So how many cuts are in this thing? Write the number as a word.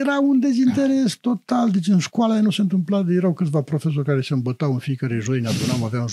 zero